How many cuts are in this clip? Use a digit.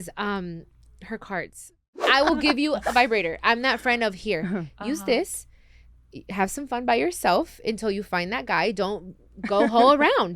1